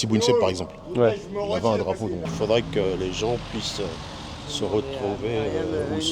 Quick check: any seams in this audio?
yes; 1 cut; at 2.3 s

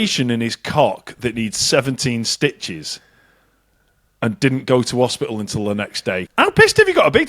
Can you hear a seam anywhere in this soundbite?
yes; 1 cut; at 6.3 s

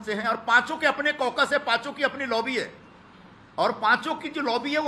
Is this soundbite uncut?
yes; 0 cuts

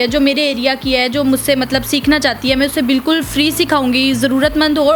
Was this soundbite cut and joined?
no; 0 cuts

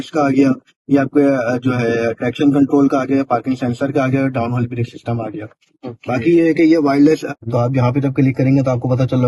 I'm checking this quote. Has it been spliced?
yes; 1 cut; at 7.3 s

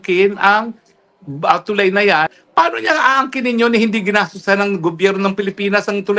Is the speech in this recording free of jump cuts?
no; 1 cut; at 2.3 s

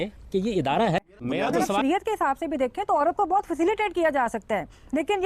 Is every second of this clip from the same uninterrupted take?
no; 1 cut; at 1.3 s

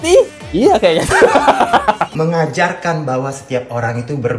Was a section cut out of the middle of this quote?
yes; 1 cut; at 2.1 s

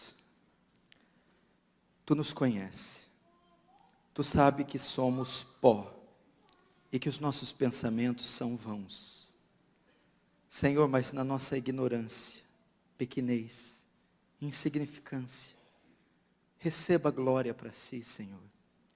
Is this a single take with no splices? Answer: no; 1 cut; at 7.0 s

